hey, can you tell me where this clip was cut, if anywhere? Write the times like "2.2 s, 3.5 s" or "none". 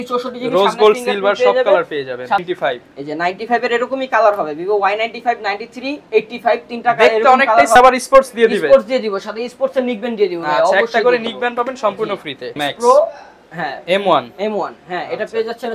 2.4 s, 7.8 s, 12.6 s